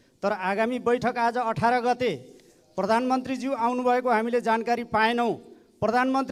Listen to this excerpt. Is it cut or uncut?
uncut